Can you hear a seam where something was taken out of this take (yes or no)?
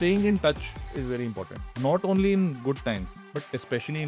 no